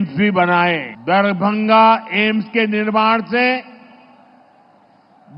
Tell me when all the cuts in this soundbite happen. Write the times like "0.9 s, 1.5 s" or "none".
0.9 s